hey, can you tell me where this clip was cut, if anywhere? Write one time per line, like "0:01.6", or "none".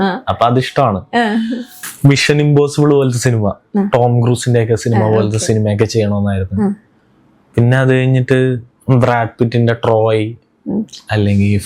0:01.8